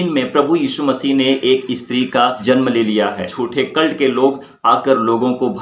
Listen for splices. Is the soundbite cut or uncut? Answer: cut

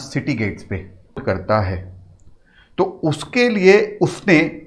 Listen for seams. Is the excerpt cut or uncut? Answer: cut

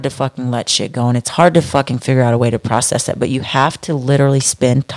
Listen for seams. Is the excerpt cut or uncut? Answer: uncut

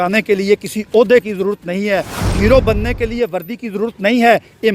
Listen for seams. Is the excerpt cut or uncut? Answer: uncut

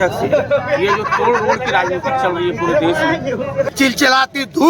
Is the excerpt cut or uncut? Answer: cut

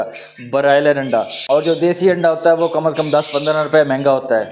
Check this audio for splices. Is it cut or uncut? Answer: uncut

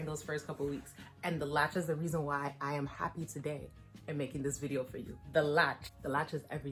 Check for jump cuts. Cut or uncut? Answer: uncut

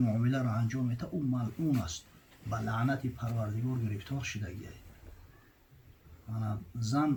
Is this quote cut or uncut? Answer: uncut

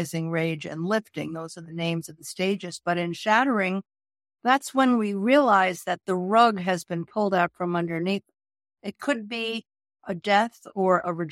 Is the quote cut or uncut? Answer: cut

